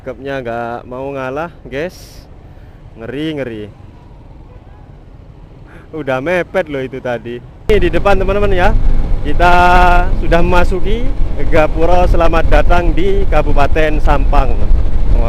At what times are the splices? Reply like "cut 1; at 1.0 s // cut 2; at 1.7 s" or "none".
cut 1; at 7.5 s